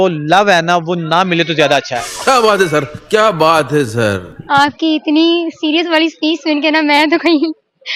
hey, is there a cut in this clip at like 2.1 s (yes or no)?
no